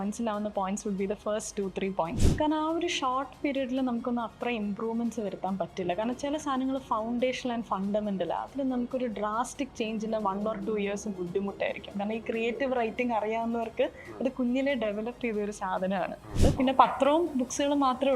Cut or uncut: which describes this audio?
cut